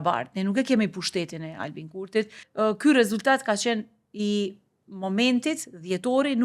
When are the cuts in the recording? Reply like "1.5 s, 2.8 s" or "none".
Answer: 2.4 s